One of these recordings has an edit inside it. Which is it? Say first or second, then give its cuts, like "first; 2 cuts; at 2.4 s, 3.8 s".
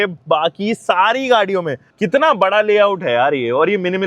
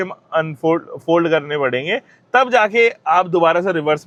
first; 1 cut; at 1.8 s